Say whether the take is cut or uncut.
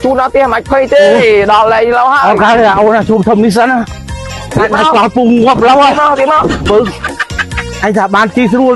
uncut